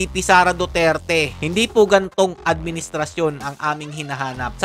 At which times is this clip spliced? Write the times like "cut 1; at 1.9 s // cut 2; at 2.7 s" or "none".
cut 1; at 1.3 s